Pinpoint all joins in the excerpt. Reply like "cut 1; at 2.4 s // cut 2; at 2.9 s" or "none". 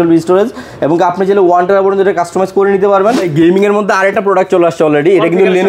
cut 1; at 3.3 s